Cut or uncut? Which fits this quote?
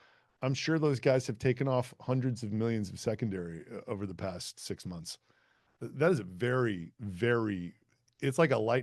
uncut